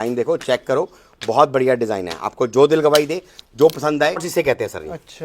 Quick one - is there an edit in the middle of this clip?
yes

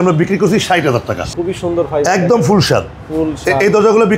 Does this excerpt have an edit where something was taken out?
yes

